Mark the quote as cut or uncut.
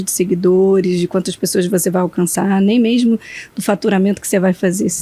uncut